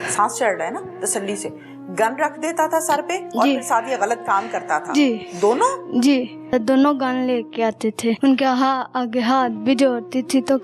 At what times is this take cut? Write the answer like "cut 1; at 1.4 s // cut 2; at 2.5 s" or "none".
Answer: cut 1; at 6.5 s // cut 2; at 8.2 s

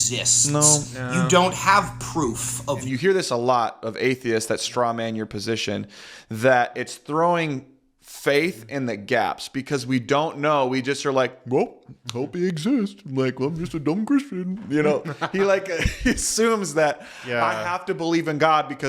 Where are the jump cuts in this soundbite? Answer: cut 1; at 2.9 s

